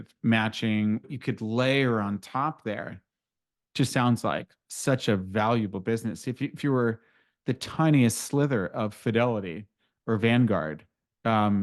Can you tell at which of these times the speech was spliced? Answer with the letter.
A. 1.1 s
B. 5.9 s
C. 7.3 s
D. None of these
A